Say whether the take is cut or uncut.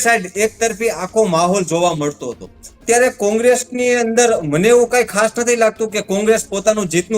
cut